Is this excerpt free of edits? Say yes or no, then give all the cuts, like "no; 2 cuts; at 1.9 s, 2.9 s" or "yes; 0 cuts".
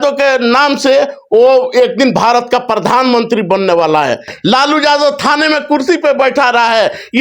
no; 1 cut; at 4.3 s